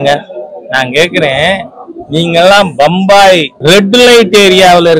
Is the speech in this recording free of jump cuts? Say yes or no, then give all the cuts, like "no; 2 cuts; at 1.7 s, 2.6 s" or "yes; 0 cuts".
no; 1 cut; at 3.5 s